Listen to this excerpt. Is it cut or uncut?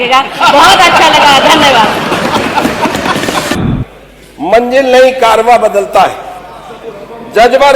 cut